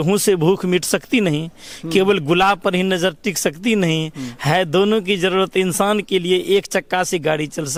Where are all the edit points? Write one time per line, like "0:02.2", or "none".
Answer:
none